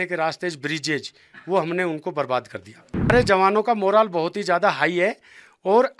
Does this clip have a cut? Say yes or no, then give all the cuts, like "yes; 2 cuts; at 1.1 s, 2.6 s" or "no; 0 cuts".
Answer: yes; 1 cut; at 3.1 s